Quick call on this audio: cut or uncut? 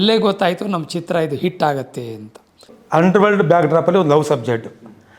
cut